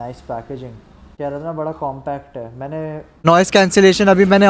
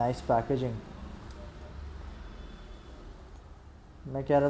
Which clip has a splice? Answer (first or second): first